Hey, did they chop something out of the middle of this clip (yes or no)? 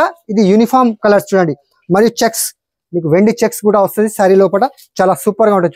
no